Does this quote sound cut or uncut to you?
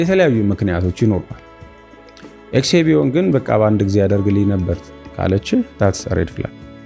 uncut